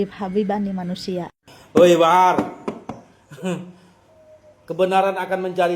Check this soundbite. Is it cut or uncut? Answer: cut